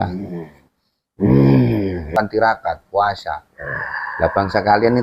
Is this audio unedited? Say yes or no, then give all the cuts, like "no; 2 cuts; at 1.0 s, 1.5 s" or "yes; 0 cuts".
no; 1 cut; at 2.1 s